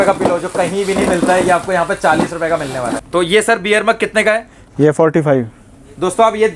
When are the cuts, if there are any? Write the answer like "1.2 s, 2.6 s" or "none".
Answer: 3.0 s